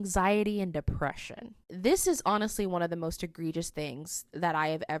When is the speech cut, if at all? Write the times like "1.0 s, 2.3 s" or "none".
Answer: 1.6 s